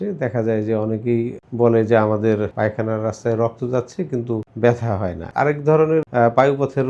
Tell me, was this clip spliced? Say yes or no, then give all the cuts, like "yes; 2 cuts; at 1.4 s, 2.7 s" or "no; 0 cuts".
yes; 5 cuts; at 1.4 s, 2.5 s, 4.5 s, 5.2 s, 6.1 s